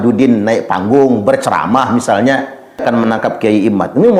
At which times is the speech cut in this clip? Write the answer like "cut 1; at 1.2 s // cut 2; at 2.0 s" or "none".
cut 1; at 2.8 s